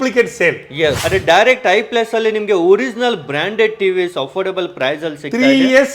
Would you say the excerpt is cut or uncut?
cut